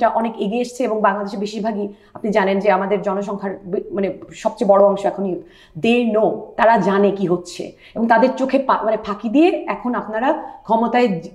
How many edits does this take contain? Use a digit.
0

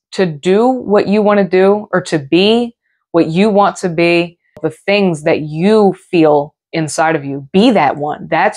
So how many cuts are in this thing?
1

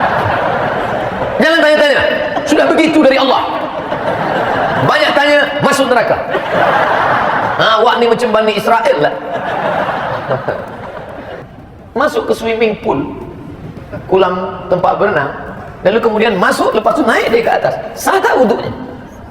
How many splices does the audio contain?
1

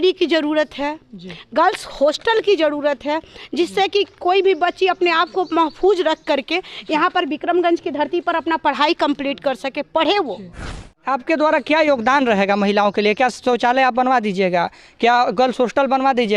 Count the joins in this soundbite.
1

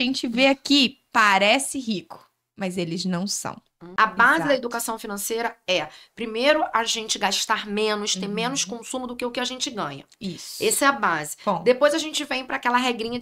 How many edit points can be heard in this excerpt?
1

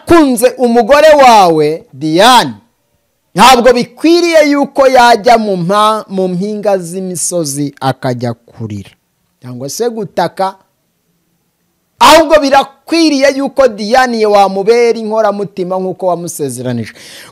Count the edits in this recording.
0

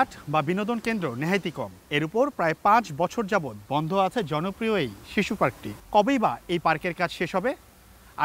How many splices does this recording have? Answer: 2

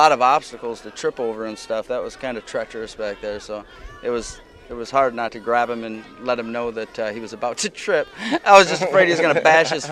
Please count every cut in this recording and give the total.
0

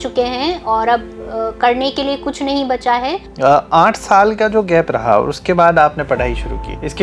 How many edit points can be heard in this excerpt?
1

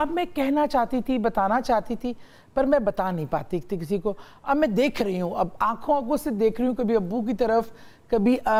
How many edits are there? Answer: 0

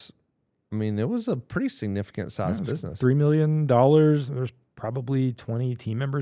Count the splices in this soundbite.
0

